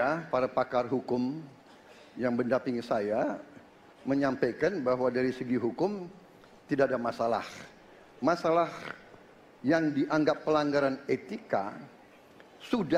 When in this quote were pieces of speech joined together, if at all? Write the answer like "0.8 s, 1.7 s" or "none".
none